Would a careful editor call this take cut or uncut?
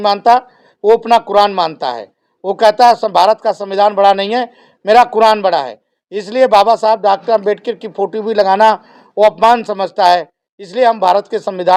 uncut